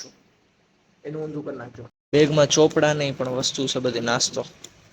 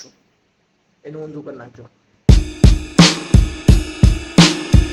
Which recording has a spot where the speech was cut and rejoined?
first; 1 cut; at 1.9 s

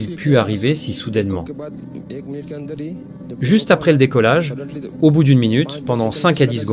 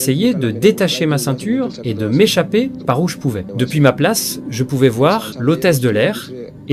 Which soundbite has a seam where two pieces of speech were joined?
second; 2 cuts; at 3.5 s, 5.3 s

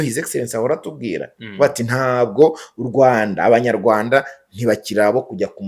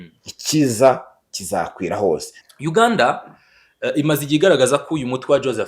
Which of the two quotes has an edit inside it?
second; 1 cut; at 2.3 s

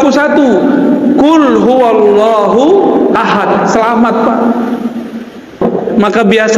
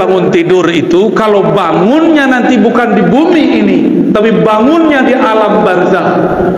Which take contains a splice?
first; 1 cut; at 5.6 s

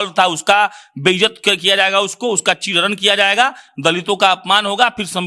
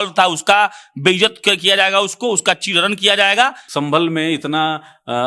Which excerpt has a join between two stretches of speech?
second; 1 cut; at 3.6 s

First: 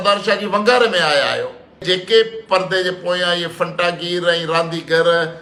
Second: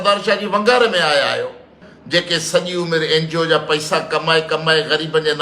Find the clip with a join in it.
second; 1 cut; at 1.7 s

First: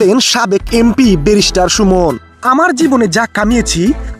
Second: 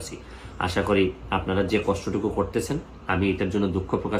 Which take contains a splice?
second; 1 cut; at 3.0 s

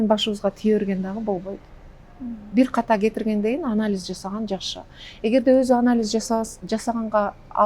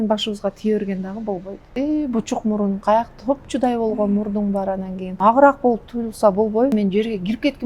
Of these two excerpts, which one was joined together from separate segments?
second; 3 cuts; at 1.6 s, 5.1 s, 6.7 s

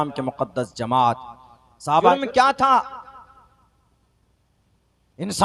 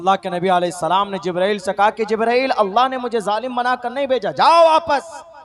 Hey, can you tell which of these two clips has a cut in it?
first; 1 cut; at 2.1 s

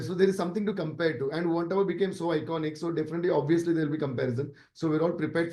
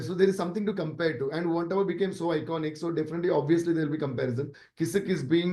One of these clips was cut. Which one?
second; 1 cut; at 4.6 s

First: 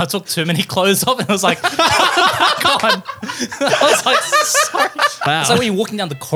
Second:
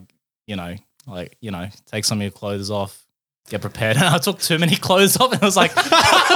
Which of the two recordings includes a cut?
first; 1 cut; at 5.2 s

